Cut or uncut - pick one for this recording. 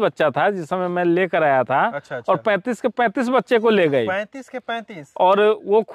uncut